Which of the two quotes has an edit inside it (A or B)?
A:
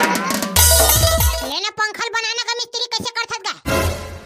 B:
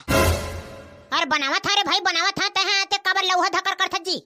A